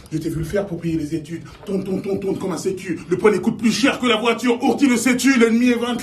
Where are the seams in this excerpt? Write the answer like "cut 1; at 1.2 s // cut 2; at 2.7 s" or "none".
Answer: cut 1; at 0.9 s